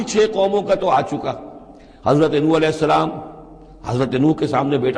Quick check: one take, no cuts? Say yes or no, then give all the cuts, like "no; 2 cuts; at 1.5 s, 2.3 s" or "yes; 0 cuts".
yes; 0 cuts